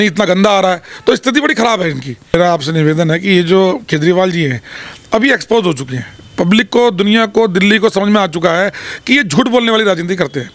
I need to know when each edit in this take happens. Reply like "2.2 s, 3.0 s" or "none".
2.3 s